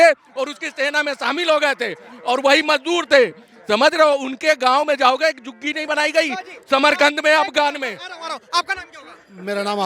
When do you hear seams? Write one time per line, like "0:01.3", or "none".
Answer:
none